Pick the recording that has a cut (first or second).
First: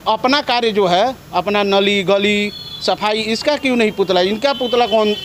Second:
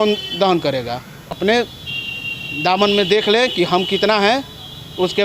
second